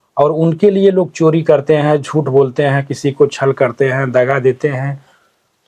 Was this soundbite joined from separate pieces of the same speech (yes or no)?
no